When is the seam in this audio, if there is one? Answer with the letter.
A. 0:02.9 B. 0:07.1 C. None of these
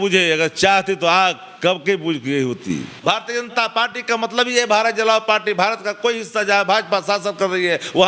A